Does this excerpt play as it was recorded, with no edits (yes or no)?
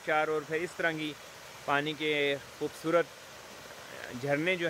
yes